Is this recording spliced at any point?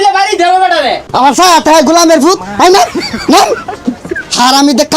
yes; 1 cut; at 1.0 s

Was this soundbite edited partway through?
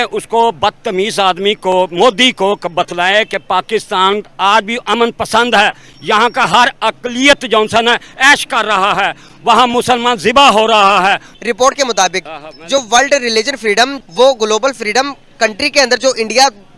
yes; 2 cuts; at 11.3 s, 14.0 s

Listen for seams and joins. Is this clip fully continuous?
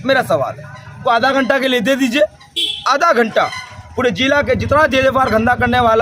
no; 1 cut; at 1.0 s

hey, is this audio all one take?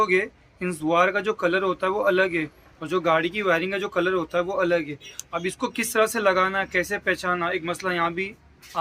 yes; 0 cuts

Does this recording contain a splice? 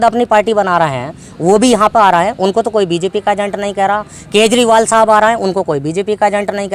no; 0 cuts

